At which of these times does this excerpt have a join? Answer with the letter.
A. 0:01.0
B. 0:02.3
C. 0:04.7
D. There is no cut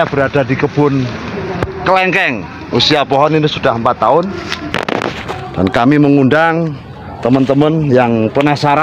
C